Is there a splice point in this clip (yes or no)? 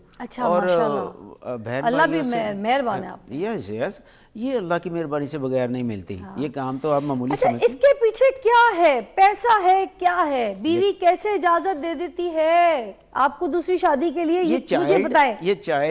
no